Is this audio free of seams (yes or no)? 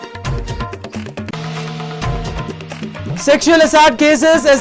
no